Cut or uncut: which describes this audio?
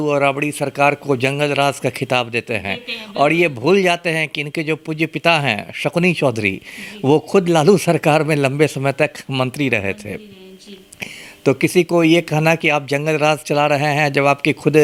uncut